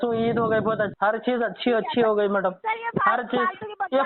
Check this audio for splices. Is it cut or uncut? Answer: cut